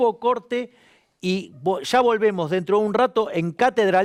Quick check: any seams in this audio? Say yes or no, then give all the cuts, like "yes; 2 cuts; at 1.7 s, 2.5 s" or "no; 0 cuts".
no; 0 cuts